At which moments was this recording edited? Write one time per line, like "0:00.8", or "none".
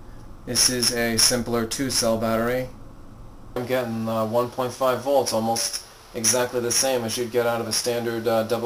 none